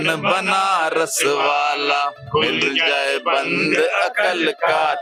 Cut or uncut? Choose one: uncut